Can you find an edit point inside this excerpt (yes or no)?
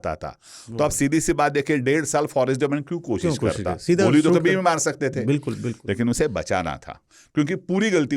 no